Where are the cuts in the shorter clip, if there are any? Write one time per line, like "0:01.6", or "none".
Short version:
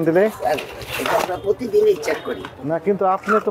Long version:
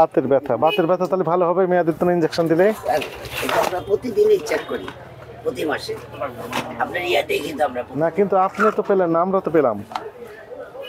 0:02.5